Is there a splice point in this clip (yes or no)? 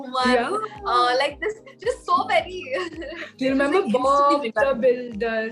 no